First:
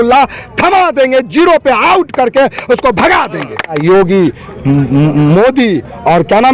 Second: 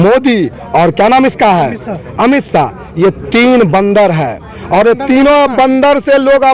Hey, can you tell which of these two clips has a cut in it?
first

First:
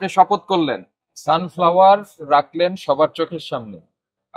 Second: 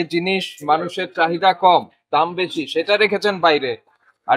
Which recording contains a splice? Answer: first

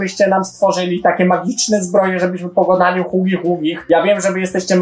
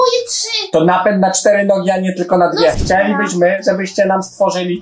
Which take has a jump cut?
second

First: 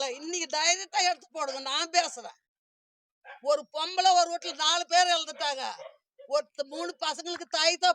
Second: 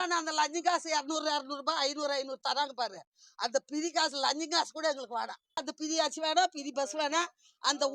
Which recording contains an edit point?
second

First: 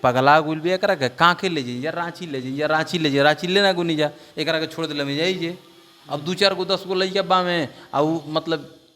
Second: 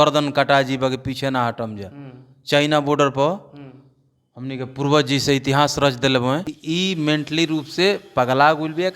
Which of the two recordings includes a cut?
second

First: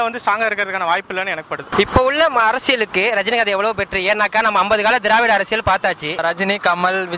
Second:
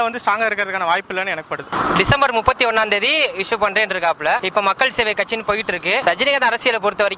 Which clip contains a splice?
first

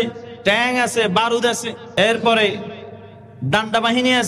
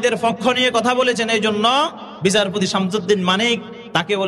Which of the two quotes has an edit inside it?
first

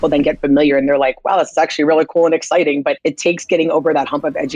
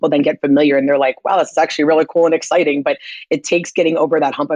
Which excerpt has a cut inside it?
first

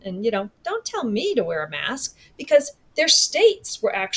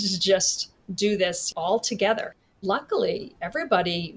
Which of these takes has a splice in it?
second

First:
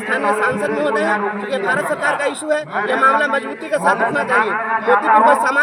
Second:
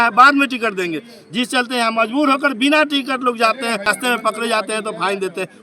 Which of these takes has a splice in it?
second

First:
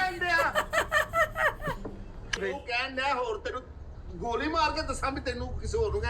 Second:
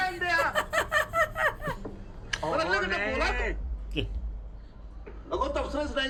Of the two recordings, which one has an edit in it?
first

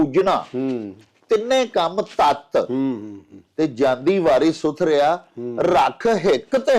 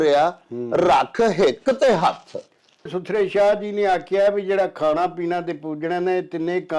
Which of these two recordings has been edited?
second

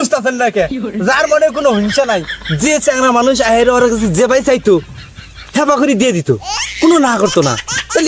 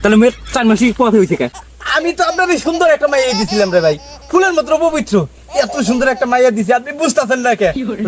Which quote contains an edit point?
second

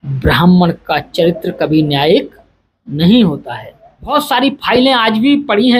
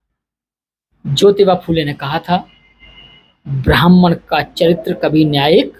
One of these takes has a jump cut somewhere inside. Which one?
first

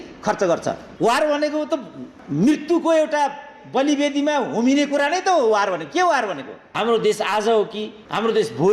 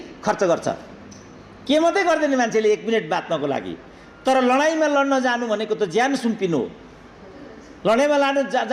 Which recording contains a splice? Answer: first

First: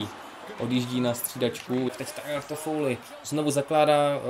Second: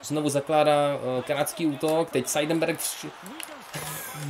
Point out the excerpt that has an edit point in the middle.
first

